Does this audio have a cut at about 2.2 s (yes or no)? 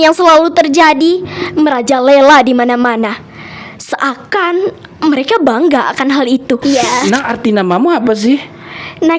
no